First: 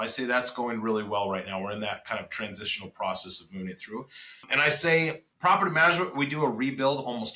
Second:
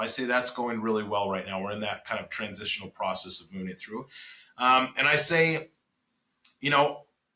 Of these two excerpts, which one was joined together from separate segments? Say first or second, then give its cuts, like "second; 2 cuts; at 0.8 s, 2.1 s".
first; 2 cuts; at 4.5 s, 5.3 s